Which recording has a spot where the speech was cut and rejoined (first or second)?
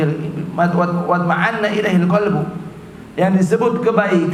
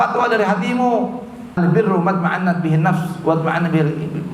second